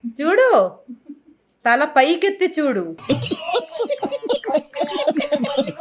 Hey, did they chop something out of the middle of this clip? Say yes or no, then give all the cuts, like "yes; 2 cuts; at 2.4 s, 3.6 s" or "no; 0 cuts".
no; 0 cuts